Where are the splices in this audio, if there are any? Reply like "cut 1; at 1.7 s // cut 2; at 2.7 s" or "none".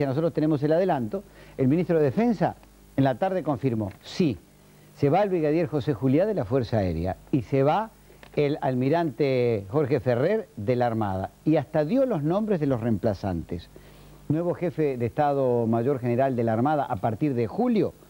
cut 1; at 16.3 s